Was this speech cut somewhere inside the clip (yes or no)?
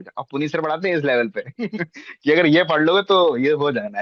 no